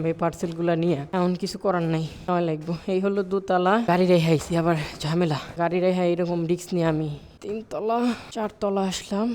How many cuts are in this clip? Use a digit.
6